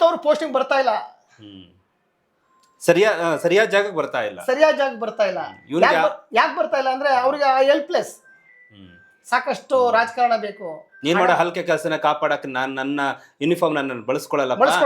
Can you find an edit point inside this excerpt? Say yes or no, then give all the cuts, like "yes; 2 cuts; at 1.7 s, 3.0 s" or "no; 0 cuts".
no; 0 cuts